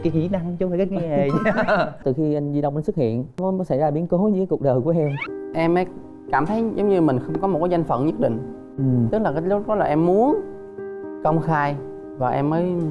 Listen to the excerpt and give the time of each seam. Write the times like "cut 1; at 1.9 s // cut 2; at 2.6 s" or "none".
cut 1; at 2.0 s // cut 2; at 3.4 s // cut 3; at 5.3 s

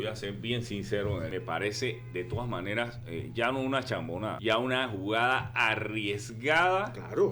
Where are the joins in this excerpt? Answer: cut 1; at 1.3 s // cut 2; at 4.4 s

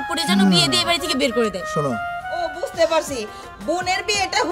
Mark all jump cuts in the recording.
cut 1; at 2.6 s

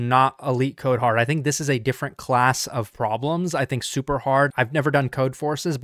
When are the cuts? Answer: none

